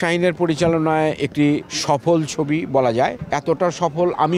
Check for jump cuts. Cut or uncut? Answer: cut